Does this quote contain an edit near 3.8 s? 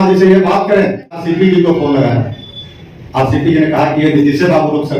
no; 1 cut; at 1.2 s

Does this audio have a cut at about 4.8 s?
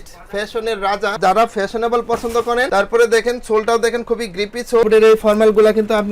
yes; 3 cuts; at 1.2 s, 2.7 s, 4.8 s

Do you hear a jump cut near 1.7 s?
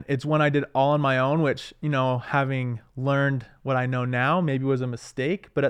no; 0 cuts

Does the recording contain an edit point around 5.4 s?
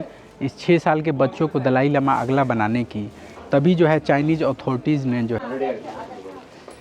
yes; 1 cut; at 5.4 s

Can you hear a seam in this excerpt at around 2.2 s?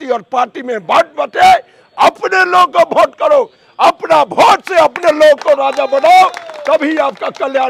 no; 0 cuts

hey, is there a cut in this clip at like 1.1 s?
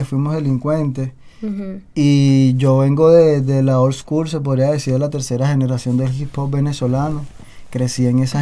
no; 0 cuts

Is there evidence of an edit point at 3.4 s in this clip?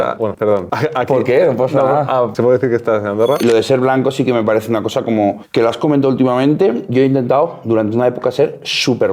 yes; 2 cuts; at 3.4 s, 6.9 s

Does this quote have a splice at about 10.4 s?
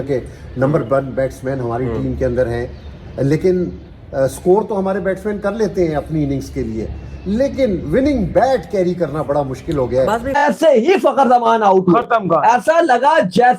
yes; 1 cut; at 10.4 s

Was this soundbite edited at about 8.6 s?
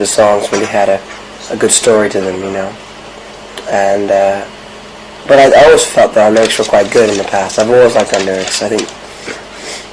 yes; 1 cut; at 8.6 s

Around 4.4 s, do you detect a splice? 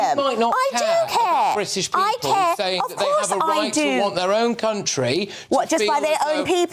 no; 0 cuts

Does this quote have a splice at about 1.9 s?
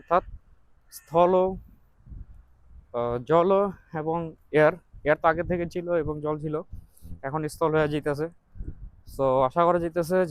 no; 0 cuts

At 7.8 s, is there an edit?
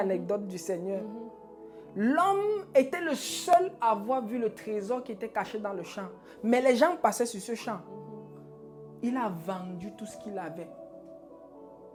no; 0 cuts

